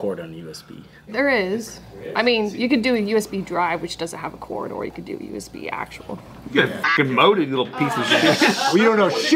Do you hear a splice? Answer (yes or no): no